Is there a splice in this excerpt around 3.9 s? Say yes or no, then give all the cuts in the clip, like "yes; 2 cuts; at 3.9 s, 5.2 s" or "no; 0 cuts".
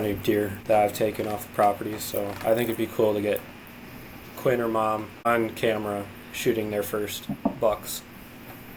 no; 0 cuts